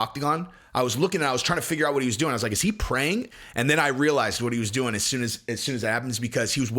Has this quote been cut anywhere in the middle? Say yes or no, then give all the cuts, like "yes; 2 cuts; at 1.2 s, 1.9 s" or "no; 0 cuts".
yes; 1 cut; at 3.3 s